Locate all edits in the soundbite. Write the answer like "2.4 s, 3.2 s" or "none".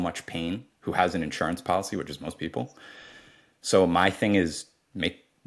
none